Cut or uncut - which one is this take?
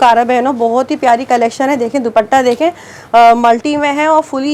uncut